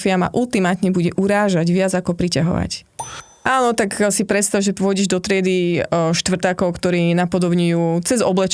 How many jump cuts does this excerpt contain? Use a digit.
1